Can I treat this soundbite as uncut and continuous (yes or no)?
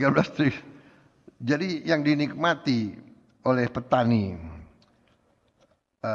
yes